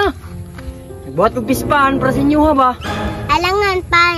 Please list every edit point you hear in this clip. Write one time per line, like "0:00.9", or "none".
none